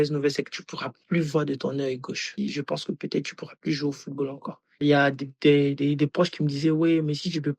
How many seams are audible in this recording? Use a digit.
2